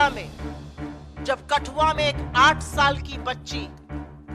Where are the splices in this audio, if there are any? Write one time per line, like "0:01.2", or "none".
0:03.4